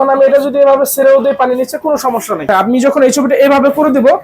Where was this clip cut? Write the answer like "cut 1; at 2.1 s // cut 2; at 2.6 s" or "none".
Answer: cut 1; at 2.5 s